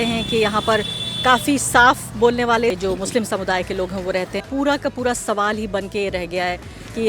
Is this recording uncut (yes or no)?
no